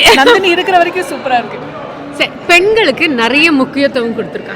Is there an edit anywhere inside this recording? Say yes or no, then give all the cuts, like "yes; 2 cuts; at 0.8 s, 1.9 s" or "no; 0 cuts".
no; 0 cuts